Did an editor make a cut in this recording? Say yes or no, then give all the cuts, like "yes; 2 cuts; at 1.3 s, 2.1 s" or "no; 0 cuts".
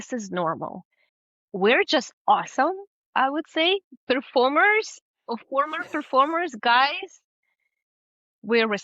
yes; 1 cut; at 1.3 s